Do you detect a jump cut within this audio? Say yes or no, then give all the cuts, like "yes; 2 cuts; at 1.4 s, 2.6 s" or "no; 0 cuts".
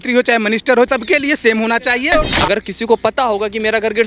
yes; 2 cuts; at 0.9 s, 2.3 s